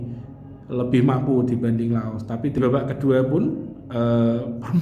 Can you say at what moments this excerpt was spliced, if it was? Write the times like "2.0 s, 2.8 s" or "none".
2.6 s